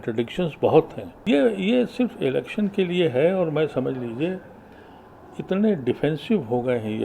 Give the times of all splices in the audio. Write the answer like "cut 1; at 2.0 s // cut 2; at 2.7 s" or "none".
cut 1; at 1.0 s